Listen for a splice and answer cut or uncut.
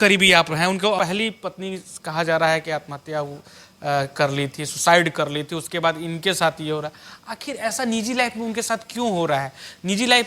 cut